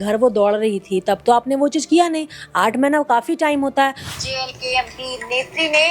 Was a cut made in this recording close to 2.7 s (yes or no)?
no